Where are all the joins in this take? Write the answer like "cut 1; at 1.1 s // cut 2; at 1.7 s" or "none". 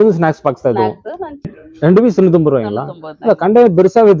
cut 1; at 1.6 s